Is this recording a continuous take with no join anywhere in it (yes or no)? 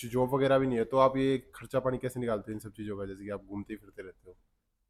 yes